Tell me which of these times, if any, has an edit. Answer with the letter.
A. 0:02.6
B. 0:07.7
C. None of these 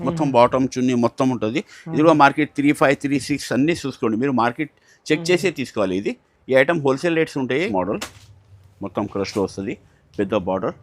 B